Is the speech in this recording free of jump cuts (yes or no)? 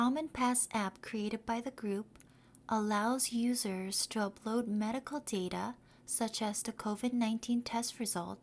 yes